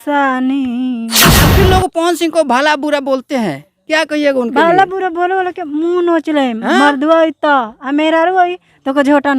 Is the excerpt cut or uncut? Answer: cut